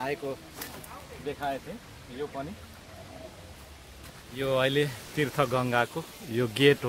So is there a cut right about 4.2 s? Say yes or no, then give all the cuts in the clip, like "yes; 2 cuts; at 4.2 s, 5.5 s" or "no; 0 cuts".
yes; 1 cut; at 4.2 s